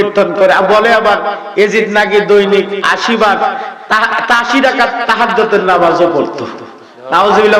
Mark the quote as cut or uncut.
uncut